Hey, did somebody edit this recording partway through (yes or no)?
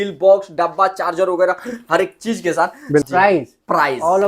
yes